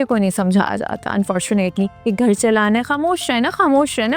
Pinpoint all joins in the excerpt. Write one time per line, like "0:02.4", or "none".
0:02.0